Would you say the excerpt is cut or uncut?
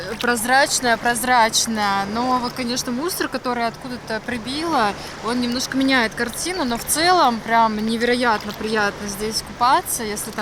uncut